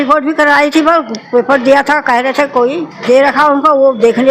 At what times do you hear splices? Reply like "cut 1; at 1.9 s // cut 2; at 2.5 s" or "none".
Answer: cut 1; at 2.9 s